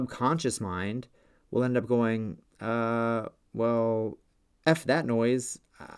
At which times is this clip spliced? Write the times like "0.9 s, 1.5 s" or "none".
none